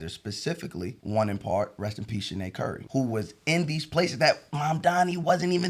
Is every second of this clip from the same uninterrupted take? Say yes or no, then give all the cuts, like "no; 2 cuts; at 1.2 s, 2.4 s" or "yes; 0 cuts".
no; 2 cuts; at 1.0 s, 2.8 s